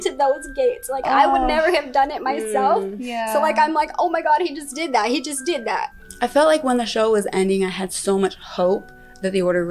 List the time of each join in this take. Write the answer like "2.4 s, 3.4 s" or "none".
5.9 s

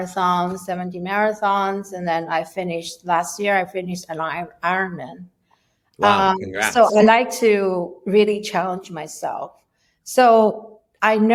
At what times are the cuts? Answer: none

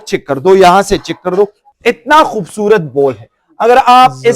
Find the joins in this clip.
1.6 s

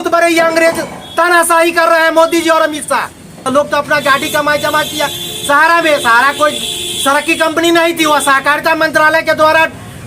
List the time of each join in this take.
3.4 s

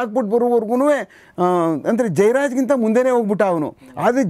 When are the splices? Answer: 1.2 s

